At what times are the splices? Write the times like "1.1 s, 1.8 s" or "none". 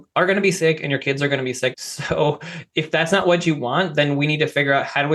1.8 s